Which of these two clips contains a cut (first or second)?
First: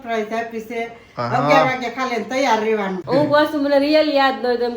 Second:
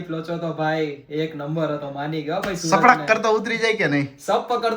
first